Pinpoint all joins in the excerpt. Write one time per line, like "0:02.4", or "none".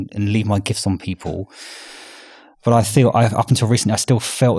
none